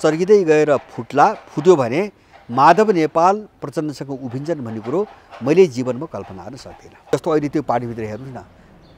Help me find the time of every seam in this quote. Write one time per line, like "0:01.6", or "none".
0:07.1

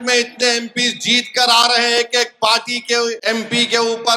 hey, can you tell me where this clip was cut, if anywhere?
0:03.2

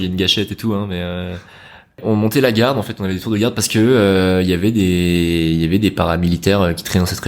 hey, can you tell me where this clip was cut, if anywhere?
0:02.0

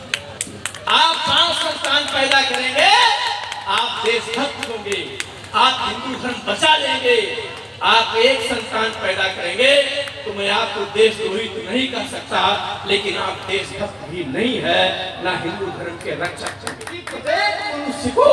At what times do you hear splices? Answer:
0:17.1

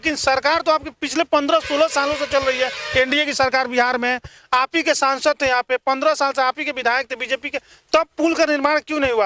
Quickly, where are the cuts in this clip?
none

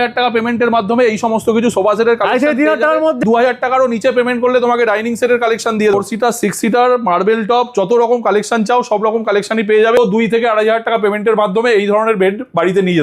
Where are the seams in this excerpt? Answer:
0:03.2
0:05.9
0:10.0

